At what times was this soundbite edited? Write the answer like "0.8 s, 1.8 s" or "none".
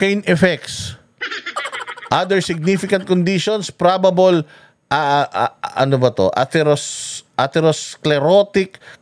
none